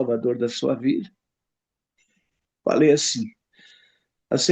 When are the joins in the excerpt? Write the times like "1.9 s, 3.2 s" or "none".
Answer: 2.5 s